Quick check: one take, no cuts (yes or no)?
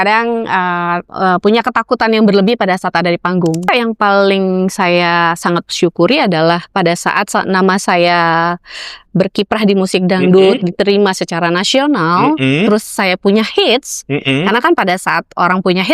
no